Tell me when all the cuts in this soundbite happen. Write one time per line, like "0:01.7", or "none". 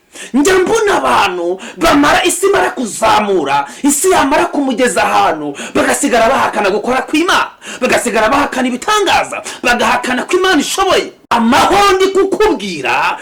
0:11.3